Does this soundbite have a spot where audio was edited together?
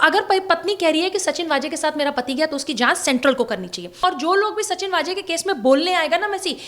yes; 1 cut; at 3.9 s

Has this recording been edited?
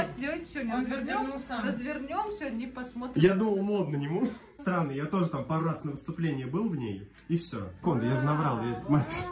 yes; 2 cuts; at 4.5 s, 7.8 s

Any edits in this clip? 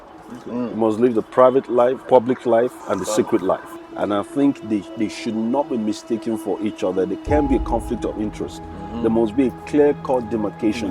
yes; 3 cuts; at 2.0 s, 2.8 s, 3.8 s

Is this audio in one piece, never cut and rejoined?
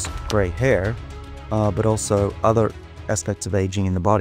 yes; 0 cuts

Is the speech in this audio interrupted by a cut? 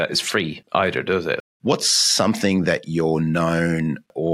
yes; 1 cut; at 1.4 s

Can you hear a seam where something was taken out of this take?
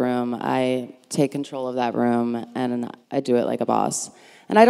yes; 2 cuts; at 1.0 s, 3.2 s

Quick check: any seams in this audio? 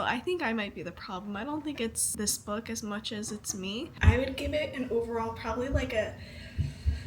yes; 2 cuts; at 2.0 s, 3.9 s

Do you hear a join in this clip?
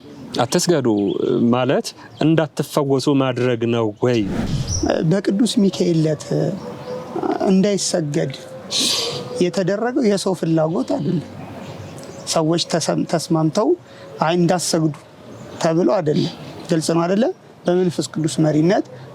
yes; 1 cut; at 4.5 s

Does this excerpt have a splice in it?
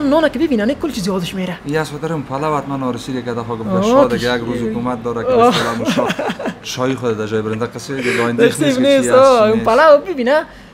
no; 0 cuts

